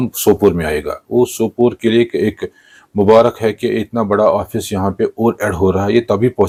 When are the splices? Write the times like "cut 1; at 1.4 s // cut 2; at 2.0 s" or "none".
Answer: none